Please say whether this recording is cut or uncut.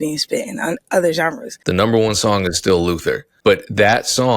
cut